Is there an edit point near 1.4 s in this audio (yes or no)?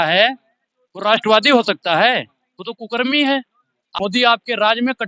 no